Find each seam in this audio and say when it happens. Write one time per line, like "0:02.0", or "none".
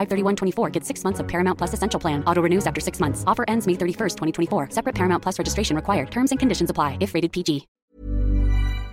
0:07.7